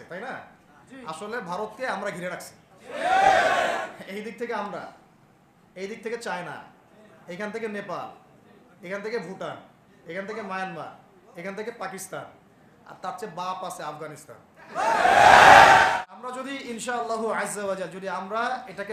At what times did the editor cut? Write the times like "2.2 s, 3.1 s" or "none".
15.9 s